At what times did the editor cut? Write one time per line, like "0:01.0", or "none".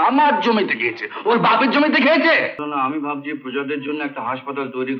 0:02.6